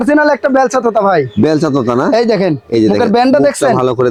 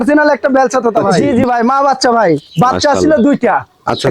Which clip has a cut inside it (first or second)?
second